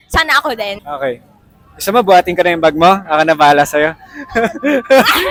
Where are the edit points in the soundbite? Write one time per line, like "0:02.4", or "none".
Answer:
none